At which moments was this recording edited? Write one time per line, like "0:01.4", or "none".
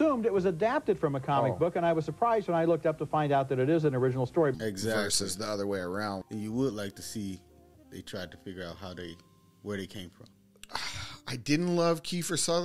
0:10.5